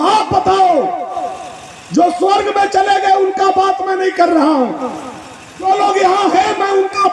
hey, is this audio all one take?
no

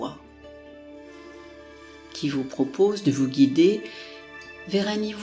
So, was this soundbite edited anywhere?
no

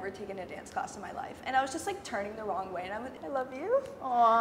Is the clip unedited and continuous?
no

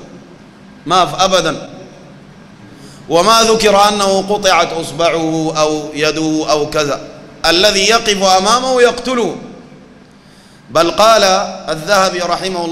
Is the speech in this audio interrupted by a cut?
no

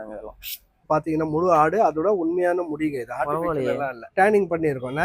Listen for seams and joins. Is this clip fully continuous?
no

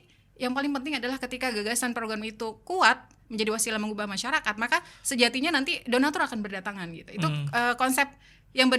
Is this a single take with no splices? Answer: yes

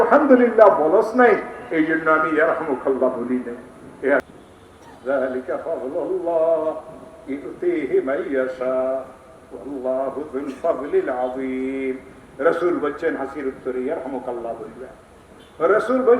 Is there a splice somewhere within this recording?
yes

